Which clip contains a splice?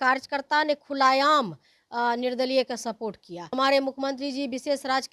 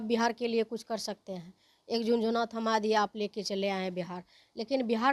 first; 1 cut; at 3.5 s

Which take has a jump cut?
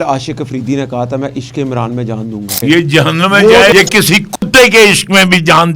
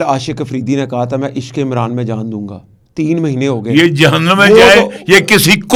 first; 2 cuts; at 2.6 s, 3.7 s

